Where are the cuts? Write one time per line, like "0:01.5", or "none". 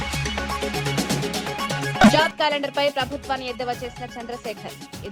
0:02.0

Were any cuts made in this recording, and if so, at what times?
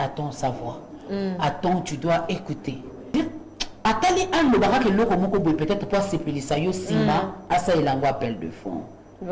0:03.1

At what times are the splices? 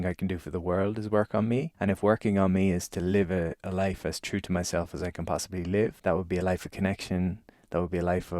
0:01.7
0:06.0

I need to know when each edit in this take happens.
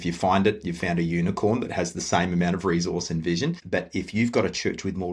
0:03.6

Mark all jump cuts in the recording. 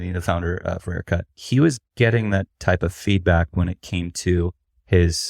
0:01.3

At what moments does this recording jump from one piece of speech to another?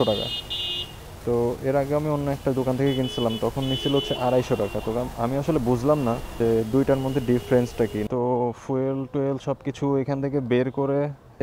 0:06.3
0:08.1

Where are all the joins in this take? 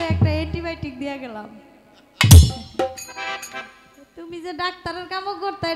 none

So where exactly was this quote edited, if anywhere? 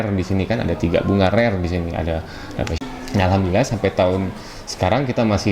0:02.8

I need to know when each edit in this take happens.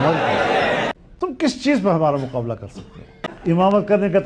0:01.0
0:03.3

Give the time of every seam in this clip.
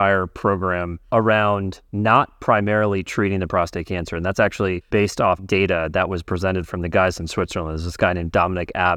0:00.9
0:04.8

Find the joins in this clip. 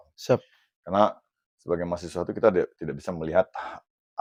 none

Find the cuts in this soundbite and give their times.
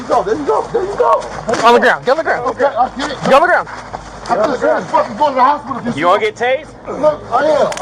none

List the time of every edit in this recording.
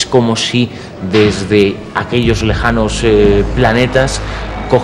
none

